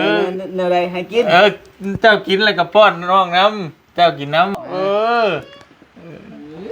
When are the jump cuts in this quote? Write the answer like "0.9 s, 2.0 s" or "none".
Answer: 4.6 s